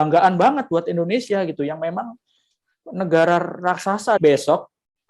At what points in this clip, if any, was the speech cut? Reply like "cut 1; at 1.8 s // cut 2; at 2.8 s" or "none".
cut 1; at 4.2 s